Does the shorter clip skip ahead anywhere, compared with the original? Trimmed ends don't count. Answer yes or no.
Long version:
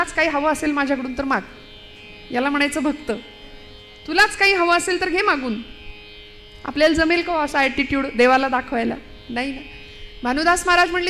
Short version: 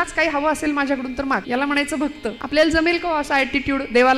yes